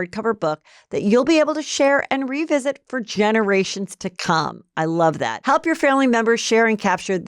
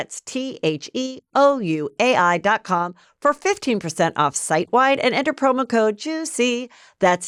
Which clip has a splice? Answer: first; 1 cut; at 4.8 s

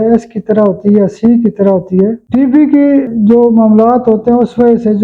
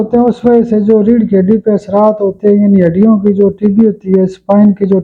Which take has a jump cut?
first; 2 cuts; at 2.2 s, 3.1 s

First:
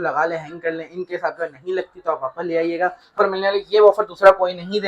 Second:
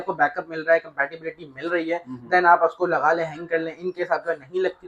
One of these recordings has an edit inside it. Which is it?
first; 1 cut; at 3.2 s

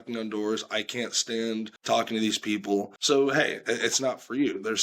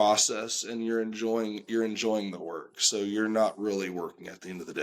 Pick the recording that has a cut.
first; 2 cuts; at 1.7 s, 2.9 s

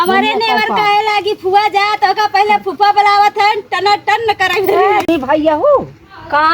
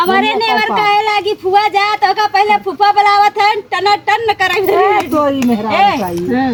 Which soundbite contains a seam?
first; 1 cut; at 5.0 s

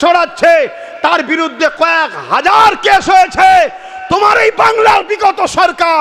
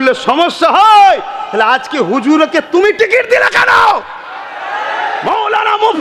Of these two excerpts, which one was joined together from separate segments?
second; 1 cut; at 4.9 s

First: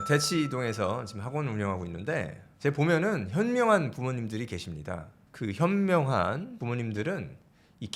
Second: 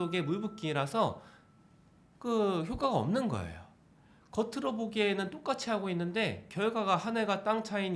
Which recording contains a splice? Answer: first; 2 cuts; at 5.2 s, 6.6 s

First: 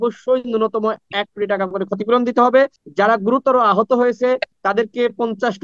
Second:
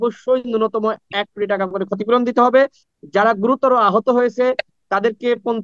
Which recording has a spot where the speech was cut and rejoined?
first; 2 cuts; at 2.8 s, 4.5 s

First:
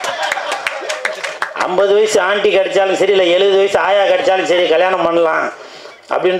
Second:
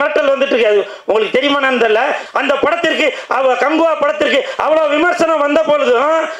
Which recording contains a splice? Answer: second; 1 cut; at 2.2 s

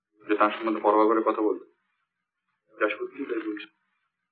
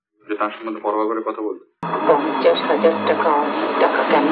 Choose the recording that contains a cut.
second; 1 cut; at 1.8 s

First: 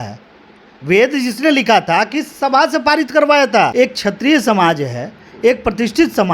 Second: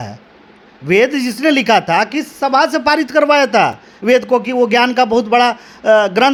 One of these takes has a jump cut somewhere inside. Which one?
first; 1 cut; at 3.7 s

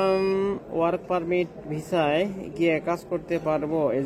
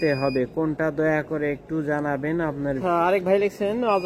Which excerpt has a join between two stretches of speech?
second; 1 cut; at 2.8 s

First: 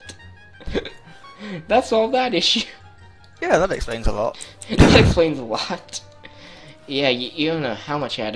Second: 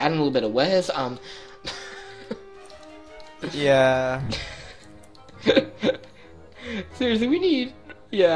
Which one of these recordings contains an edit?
second; 1 cut; at 5.6 s

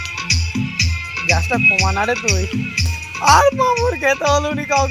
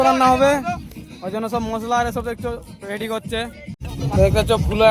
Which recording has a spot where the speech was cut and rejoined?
second; 1 cut; at 3.8 s

